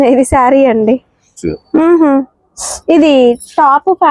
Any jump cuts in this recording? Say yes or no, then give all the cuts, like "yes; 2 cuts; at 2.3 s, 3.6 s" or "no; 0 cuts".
yes; 1 cut; at 1.5 s